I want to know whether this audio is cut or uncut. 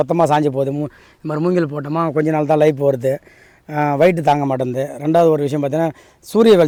uncut